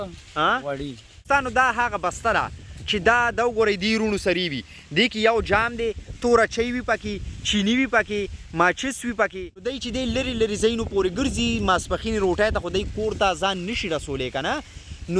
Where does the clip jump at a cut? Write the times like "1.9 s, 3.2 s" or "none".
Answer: 1.2 s, 9.8 s